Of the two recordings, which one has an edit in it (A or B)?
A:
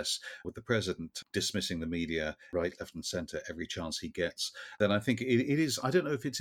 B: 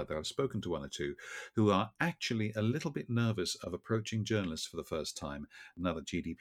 A